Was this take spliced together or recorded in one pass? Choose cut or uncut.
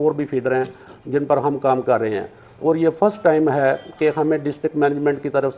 uncut